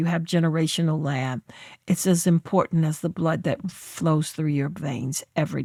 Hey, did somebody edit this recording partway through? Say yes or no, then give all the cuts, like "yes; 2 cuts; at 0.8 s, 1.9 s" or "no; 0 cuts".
no; 0 cuts